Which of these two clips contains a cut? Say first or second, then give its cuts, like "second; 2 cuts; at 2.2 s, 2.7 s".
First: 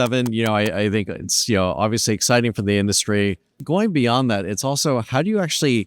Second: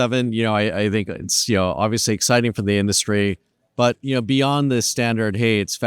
first; 1 cut; at 3.5 s